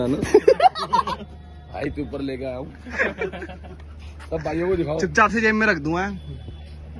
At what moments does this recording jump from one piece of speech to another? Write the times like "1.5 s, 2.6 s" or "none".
none